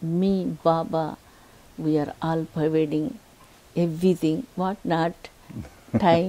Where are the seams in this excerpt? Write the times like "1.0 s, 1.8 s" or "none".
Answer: none